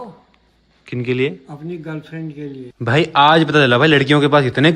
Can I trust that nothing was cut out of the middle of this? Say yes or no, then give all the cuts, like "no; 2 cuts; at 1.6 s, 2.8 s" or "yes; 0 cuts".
no; 1 cut; at 2.7 s